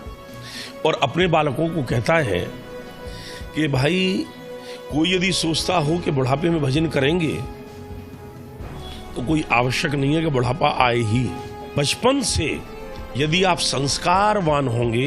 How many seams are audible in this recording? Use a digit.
1